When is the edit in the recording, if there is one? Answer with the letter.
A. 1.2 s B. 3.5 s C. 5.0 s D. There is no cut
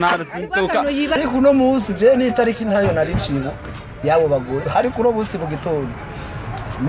A